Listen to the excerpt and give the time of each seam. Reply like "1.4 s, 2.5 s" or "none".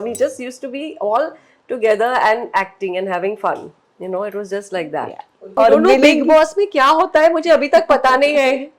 5.5 s